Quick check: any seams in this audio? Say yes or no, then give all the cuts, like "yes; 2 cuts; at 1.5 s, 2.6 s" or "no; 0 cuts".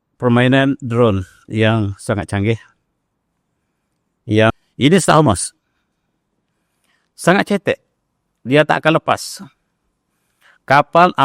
yes; 1 cut; at 4.5 s